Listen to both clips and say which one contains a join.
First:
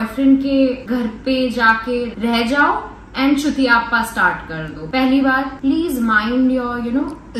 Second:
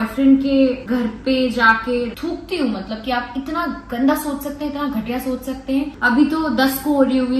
second; 2 cuts; at 2.1 s, 5.9 s

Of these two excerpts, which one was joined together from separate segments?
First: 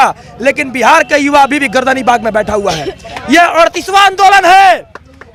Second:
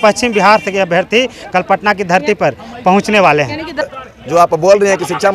second; 1 cut; at 3.8 s

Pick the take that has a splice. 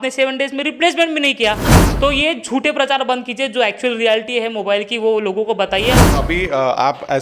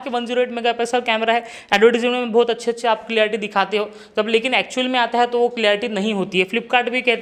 first; 2 cuts; at 1.8 s, 6.1 s

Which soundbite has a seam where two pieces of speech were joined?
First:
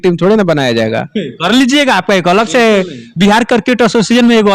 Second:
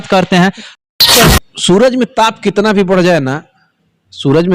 second; 1 cut; at 1.1 s

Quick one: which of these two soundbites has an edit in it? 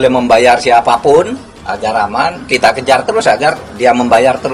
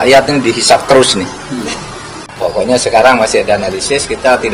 second; 1 cut; at 2.2 s

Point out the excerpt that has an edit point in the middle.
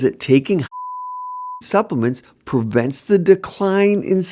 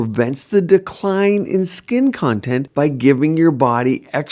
second; 1 cut; at 2.7 s

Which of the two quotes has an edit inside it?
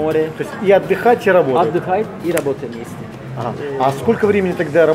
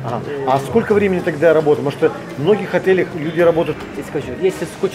second; 1 cut; at 3.8 s

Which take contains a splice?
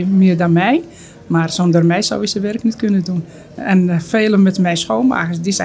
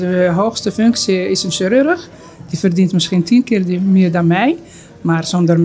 first; 1 cut; at 3.5 s

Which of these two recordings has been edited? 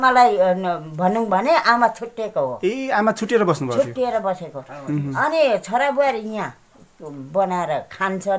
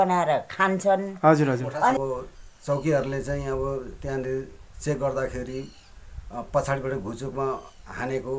second; 1 cut; at 1.9 s

